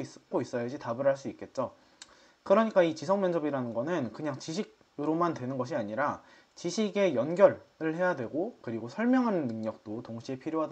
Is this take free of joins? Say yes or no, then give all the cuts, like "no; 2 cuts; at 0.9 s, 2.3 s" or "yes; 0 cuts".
yes; 0 cuts